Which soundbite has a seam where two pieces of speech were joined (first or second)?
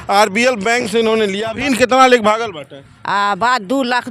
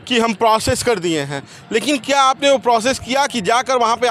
first